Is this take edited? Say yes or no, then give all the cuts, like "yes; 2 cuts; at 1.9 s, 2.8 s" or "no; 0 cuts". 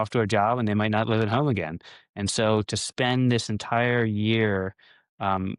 no; 0 cuts